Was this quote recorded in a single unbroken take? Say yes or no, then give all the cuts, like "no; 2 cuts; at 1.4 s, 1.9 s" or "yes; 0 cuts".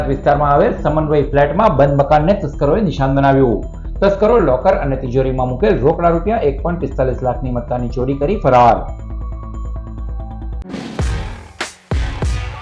no; 1 cut; at 10.6 s